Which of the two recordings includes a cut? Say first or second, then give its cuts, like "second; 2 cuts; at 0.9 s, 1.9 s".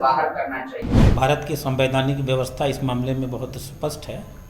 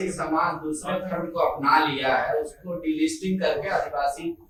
first; 1 cut; at 0.9 s